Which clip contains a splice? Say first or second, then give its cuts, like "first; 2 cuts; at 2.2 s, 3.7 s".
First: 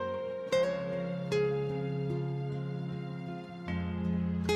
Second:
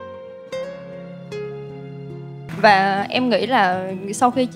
second; 1 cut; at 2.5 s